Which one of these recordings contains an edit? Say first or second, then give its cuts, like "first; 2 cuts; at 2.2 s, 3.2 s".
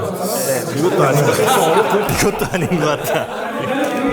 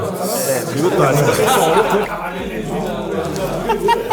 second; 1 cut; at 2.1 s